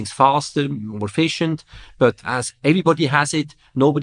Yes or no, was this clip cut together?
yes